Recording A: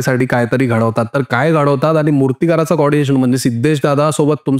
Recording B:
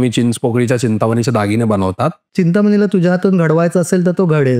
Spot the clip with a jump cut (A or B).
B